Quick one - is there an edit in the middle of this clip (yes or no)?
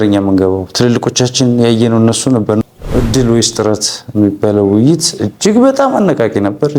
yes